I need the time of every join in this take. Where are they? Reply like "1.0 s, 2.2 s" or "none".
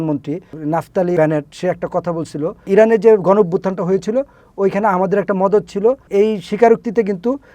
0.9 s, 2.7 s, 6.0 s